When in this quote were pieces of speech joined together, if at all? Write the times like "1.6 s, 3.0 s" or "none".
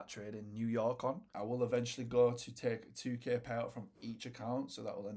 1.3 s